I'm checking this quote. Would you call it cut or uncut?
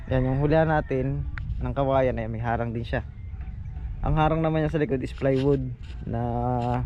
uncut